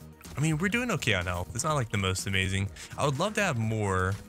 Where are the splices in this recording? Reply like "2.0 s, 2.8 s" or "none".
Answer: none